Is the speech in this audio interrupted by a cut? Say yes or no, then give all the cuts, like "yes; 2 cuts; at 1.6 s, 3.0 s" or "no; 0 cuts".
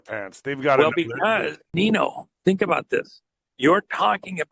yes; 1 cut; at 1.6 s